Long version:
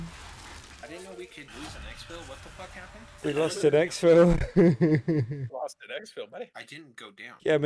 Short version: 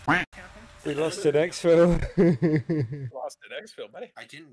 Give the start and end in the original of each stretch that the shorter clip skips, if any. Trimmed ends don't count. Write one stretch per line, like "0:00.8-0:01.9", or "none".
none